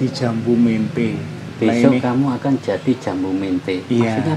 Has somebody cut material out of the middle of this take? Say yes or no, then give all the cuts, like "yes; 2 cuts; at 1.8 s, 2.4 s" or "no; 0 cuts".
yes; 1 cut; at 1.4 s